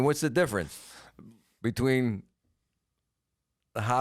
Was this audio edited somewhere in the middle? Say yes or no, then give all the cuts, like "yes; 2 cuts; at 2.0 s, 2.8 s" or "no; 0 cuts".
no; 0 cuts